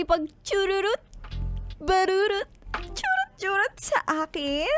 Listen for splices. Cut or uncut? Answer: uncut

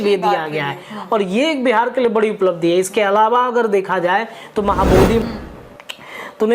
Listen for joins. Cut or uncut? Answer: cut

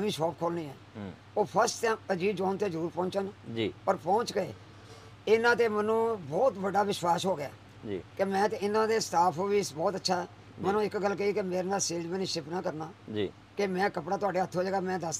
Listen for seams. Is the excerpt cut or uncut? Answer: uncut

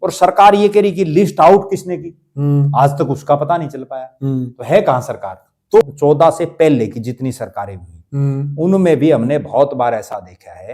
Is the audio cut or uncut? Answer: cut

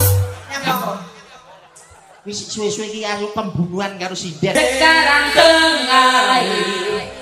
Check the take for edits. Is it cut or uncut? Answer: cut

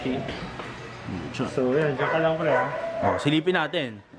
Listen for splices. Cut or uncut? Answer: uncut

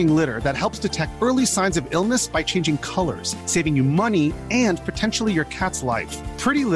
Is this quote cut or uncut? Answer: uncut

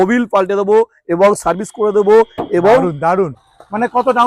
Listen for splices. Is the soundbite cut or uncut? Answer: cut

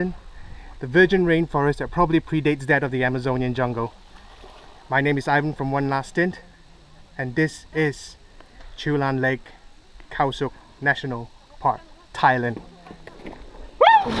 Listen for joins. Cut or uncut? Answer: uncut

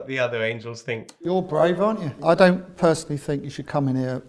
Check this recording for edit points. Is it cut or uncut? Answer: cut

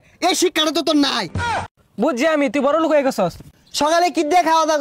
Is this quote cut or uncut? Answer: cut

